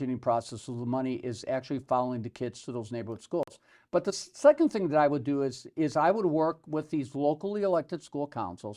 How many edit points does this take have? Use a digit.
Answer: 0